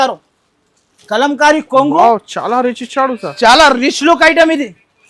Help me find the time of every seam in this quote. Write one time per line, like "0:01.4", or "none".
none